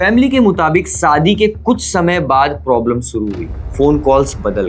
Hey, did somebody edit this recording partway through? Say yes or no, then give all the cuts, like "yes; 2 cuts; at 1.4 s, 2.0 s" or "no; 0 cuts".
no; 0 cuts